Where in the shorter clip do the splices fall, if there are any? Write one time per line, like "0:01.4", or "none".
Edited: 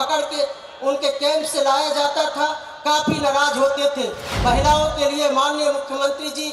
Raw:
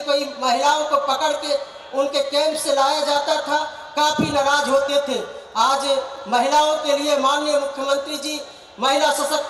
0:04.3